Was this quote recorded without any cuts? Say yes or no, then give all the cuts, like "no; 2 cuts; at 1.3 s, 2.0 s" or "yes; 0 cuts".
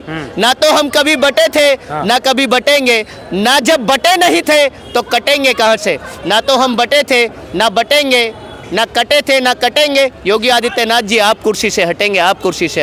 yes; 0 cuts